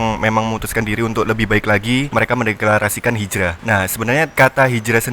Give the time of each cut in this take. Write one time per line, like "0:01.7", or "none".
0:02.1
0:03.9